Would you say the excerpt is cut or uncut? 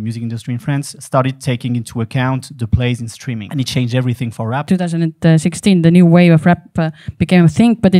cut